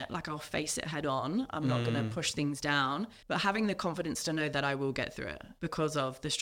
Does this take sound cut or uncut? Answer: cut